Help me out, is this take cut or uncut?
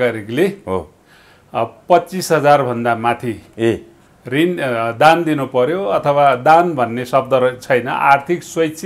uncut